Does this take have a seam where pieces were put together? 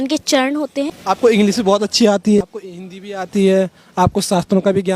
yes; 2 cuts; at 0.9 s, 2.4 s

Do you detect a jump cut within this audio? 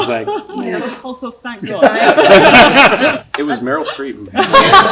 yes; 1 cut; at 3.1 s

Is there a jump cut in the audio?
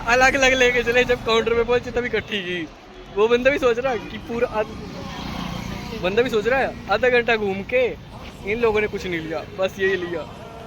no; 0 cuts

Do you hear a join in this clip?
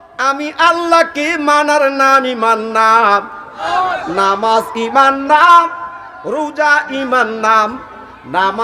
yes; 1 cut; at 3.6 s

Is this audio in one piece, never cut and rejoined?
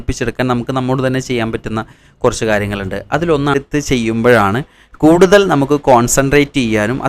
no; 1 cut; at 3.5 s

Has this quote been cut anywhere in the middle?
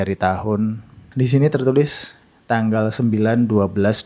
yes; 1 cut; at 1.0 s

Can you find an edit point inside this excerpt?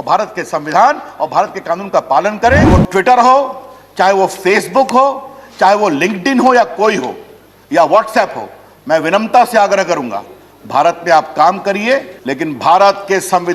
yes; 2 cuts; at 2.7 s, 12.2 s

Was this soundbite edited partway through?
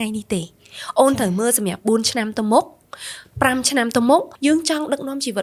yes; 1 cut; at 4.3 s

